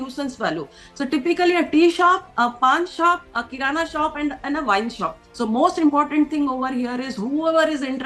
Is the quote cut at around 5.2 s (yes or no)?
yes